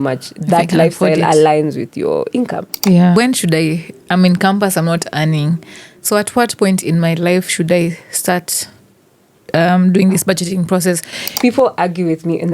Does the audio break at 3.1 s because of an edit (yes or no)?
yes